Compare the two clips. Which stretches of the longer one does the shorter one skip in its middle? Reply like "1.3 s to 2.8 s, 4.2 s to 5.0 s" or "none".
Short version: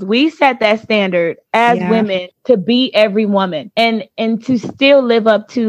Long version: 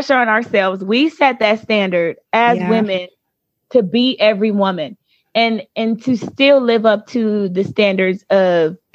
3.1 s to 3.5 s, 4.9 s to 5.2 s